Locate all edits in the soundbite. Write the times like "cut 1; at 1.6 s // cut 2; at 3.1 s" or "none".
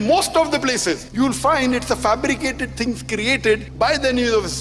cut 1; at 1.0 s // cut 2; at 3.7 s